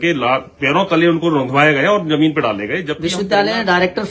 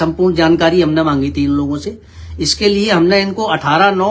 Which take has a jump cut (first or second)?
first